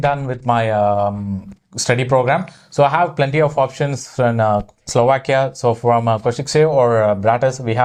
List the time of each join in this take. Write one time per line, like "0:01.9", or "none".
none